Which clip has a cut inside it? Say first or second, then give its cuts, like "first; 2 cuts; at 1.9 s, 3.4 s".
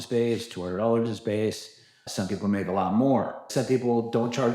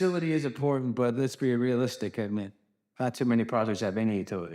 first; 2 cuts; at 2.1 s, 3.5 s